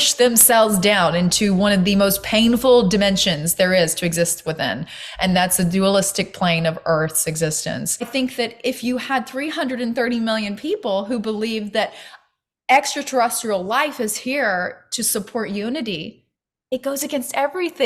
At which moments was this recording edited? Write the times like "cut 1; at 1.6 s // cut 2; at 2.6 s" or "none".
cut 1; at 8.1 s